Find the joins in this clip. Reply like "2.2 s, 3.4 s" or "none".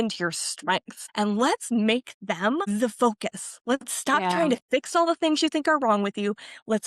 1.0 s, 2.7 s